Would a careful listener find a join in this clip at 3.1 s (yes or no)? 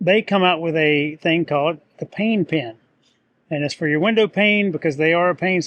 no